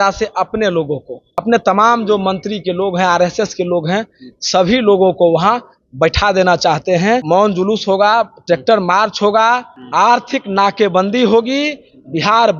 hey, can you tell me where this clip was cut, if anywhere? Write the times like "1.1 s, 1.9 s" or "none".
1.4 s, 7.2 s